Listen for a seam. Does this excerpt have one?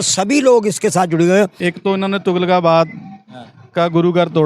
yes; 1 cut; at 1.6 s

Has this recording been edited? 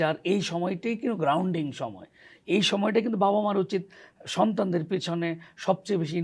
no; 0 cuts

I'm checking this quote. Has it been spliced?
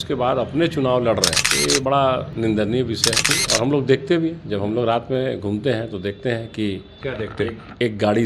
yes; 3 cuts; at 1.4 s, 2.3 s, 3.4 s

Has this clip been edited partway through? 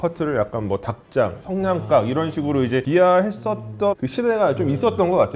yes; 2 cuts; at 2.9 s, 3.9 s

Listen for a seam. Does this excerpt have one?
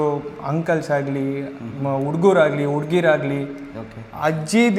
no; 0 cuts

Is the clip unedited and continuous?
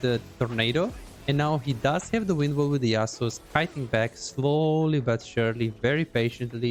yes; 0 cuts

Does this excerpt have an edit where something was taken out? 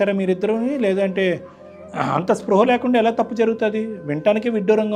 no; 0 cuts

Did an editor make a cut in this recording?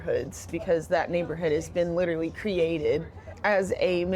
no; 0 cuts

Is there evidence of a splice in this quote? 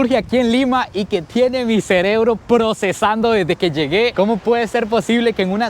yes; 1 cut; at 4.1 s

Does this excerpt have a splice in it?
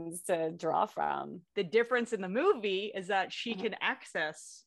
yes; 1 cut; at 1.4 s

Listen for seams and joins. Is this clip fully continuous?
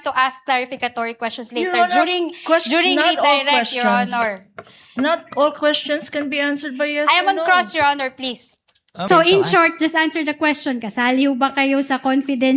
no; 1 cut; at 9.0 s

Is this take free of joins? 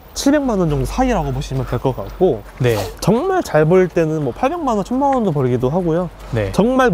yes; 0 cuts

